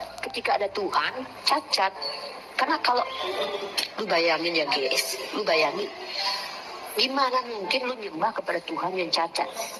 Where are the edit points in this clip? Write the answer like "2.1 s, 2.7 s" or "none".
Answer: none